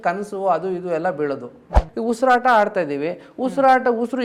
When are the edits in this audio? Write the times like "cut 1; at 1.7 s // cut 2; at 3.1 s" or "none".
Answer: cut 1; at 1.9 s